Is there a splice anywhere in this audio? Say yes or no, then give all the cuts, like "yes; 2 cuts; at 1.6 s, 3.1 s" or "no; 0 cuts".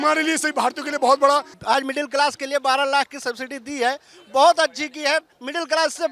yes; 1 cut; at 1.5 s